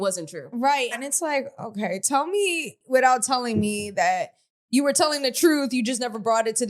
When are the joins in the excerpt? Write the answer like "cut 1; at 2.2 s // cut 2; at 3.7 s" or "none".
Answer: cut 1; at 1.0 s // cut 2; at 2.7 s